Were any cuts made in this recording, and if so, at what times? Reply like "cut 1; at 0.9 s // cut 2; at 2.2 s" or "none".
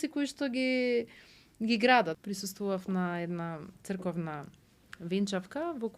cut 1; at 2.1 s